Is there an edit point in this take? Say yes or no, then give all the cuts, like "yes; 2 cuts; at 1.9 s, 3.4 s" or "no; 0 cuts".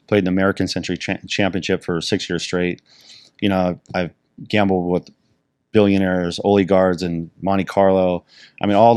no; 0 cuts